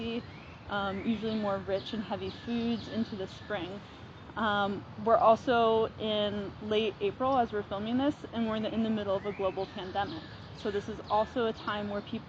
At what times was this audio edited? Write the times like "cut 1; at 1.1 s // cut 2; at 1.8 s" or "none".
none